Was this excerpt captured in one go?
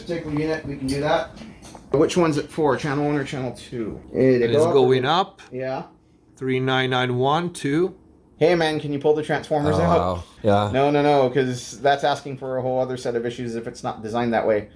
no; 4 cuts; at 1.9 s, 4.0 s, 8.2 s, 10.3 s

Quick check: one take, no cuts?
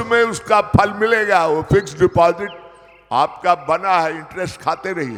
yes; 0 cuts

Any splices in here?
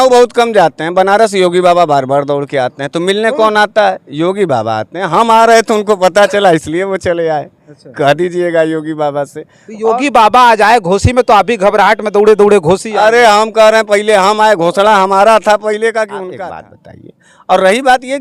yes; 1 cut; at 16.3 s

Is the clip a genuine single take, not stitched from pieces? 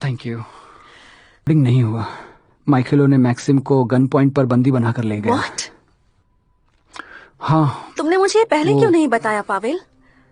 no; 1 cut; at 1.5 s

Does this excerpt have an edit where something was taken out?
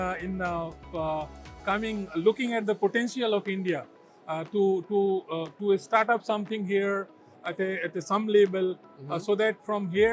no; 0 cuts

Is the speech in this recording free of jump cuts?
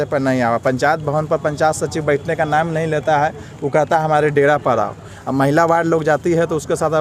yes; 0 cuts

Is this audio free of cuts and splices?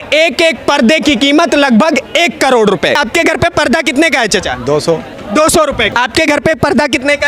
no; 2 cuts; at 3.0 s, 5.9 s

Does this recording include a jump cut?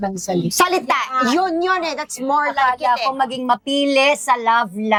no; 0 cuts

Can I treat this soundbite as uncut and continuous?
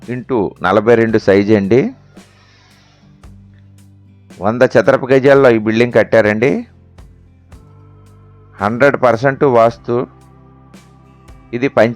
yes; 0 cuts

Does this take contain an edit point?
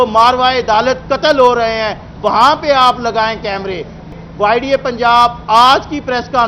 yes; 1 cut; at 4.1 s

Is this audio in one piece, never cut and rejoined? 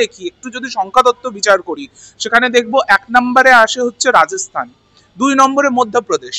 yes; 0 cuts

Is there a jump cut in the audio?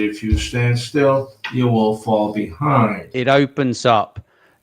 yes; 1 cut; at 3.1 s

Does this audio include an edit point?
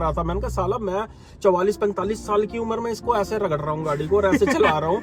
no; 0 cuts

